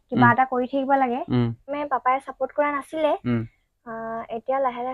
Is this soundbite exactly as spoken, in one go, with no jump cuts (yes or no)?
no